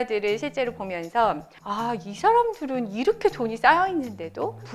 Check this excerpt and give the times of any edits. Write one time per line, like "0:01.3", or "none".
0:01.5